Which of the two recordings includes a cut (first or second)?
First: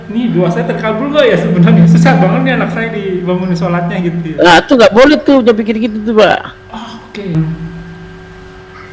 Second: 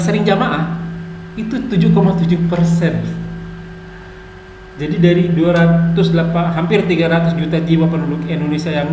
first